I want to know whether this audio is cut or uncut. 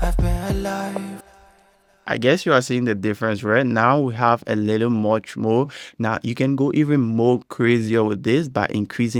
uncut